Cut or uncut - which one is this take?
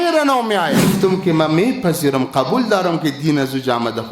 cut